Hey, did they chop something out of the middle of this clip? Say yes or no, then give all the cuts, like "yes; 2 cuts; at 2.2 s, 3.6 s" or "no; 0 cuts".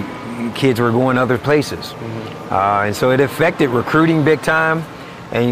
no; 0 cuts